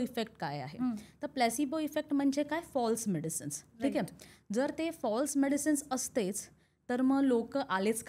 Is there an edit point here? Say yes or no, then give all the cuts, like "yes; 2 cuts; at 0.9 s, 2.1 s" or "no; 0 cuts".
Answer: no; 0 cuts